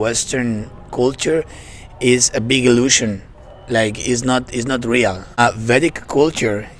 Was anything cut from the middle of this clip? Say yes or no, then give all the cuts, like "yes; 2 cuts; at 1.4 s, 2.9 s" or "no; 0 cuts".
yes; 1 cut; at 5.4 s